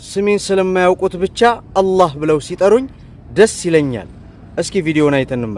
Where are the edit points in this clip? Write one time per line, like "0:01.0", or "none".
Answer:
none